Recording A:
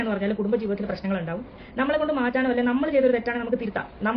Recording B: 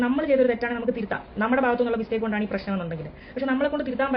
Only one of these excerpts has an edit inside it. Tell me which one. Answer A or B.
A